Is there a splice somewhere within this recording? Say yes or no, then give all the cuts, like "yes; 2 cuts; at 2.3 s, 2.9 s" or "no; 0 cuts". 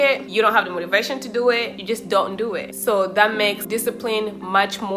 no; 0 cuts